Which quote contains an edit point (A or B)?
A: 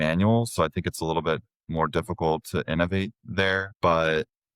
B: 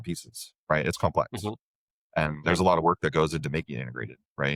A